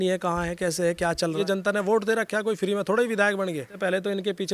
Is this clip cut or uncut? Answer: cut